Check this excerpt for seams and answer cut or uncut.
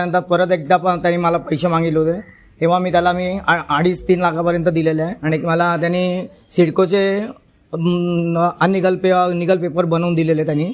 cut